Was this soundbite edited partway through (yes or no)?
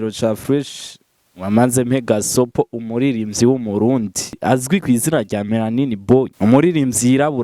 yes